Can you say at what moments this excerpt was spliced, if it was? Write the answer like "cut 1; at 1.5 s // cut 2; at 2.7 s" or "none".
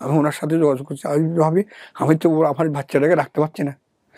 none